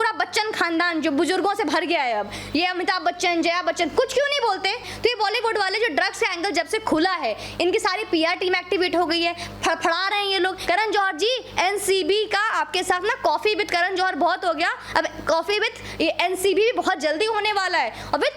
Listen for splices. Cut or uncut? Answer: cut